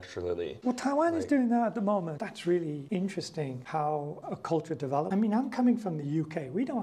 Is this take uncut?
no; 1 cut; at 5.1 s

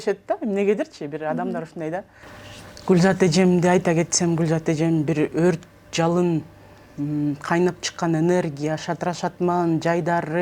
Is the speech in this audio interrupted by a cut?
yes; 1 cut; at 2.1 s

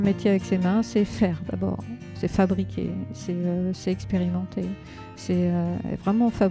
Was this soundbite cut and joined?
no; 0 cuts

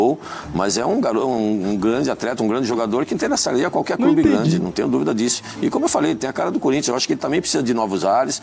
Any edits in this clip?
no; 0 cuts

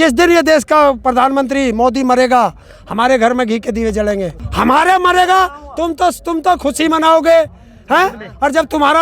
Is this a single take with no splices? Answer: no; 1 cut; at 4.4 s

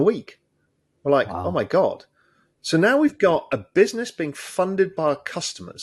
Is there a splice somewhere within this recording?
no; 0 cuts

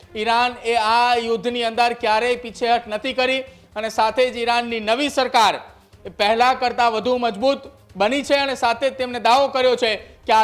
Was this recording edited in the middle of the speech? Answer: no; 0 cuts

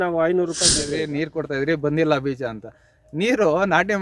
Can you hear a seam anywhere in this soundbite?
yes; 1 cut; at 0.9 s

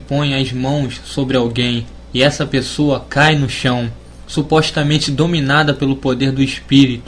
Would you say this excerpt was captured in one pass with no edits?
yes; 0 cuts

